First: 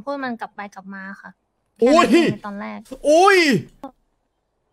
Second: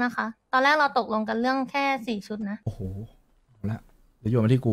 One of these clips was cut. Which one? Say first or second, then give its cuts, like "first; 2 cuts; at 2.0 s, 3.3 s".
second; 1 cut; at 2.6 s